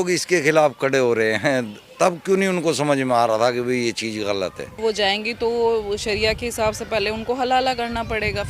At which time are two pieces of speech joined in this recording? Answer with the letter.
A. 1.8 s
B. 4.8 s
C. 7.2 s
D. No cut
B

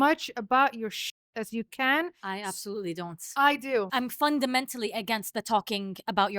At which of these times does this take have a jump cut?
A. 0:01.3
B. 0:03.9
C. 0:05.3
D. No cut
B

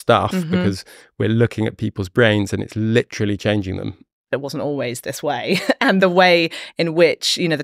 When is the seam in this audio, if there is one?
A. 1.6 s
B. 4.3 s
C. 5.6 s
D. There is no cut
B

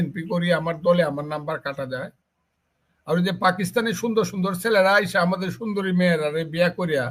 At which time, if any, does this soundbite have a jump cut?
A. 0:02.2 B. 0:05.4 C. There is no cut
A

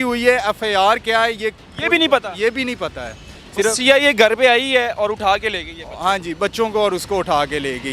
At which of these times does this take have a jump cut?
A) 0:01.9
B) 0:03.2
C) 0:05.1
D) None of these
D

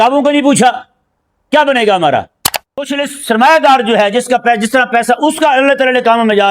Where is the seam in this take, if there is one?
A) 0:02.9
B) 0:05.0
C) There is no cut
A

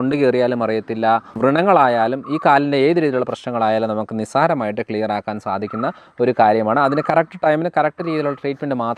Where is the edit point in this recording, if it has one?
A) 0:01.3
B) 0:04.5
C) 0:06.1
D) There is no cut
A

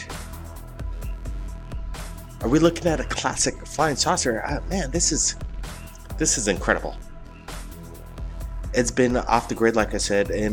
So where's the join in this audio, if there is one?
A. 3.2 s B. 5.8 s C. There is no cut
A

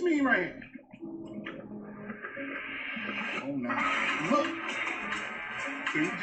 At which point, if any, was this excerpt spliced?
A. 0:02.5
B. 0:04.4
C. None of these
C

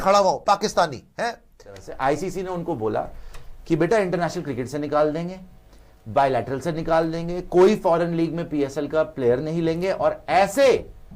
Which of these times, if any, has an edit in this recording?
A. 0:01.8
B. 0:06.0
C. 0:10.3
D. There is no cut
A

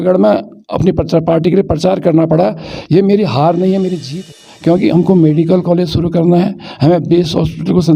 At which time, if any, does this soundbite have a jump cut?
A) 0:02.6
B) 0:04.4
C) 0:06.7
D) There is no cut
B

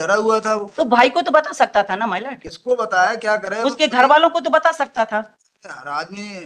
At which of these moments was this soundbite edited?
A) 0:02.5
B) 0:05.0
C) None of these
C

